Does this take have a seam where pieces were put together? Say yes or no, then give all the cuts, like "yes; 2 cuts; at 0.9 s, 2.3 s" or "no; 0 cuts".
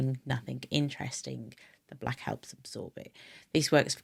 no; 0 cuts